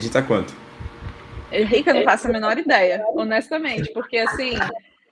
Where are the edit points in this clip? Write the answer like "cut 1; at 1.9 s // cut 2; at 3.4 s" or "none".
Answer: none

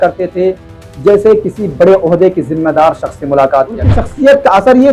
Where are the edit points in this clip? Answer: cut 1; at 4.0 s

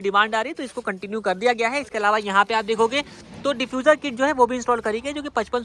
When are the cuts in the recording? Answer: none

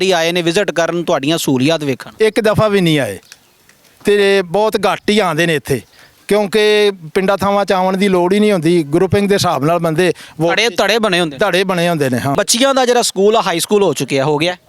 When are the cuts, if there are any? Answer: cut 1; at 12.3 s

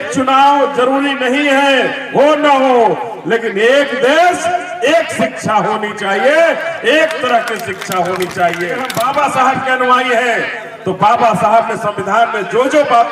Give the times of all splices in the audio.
cut 1; at 8.9 s

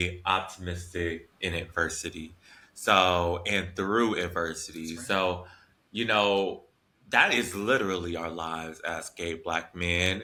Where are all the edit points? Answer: none

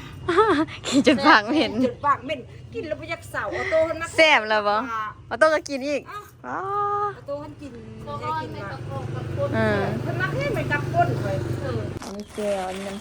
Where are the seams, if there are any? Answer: cut 1; at 12.0 s

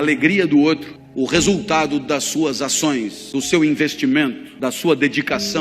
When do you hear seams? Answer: cut 1; at 1.0 s // cut 2; at 3.2 s // cut 3; at 4.5 s

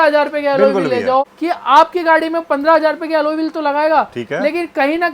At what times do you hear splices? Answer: cut 1; at 1.3 s

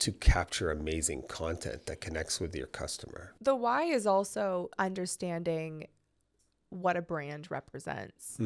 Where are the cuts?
none

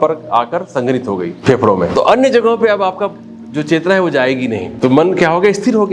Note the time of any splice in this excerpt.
cut 1; at 1.8 s // cut 2; at 4.7 s

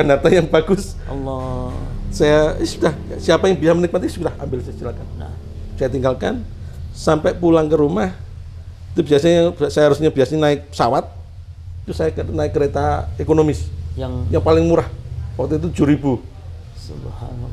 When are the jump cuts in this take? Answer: none

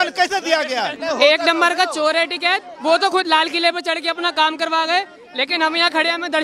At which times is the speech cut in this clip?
cut 1; at 1.0 s

